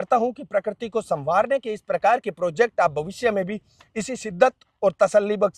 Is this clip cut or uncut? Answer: uncut